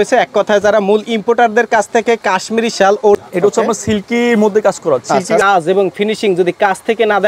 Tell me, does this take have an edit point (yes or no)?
yes